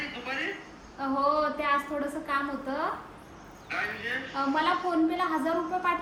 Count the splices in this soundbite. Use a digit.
0